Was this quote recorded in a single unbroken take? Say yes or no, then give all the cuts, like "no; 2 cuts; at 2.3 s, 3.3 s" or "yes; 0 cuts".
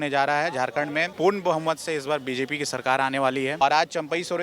no; 2 cuts; at 1.1 s, 3.6 s